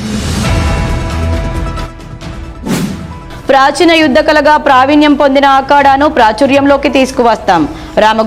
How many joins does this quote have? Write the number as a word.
one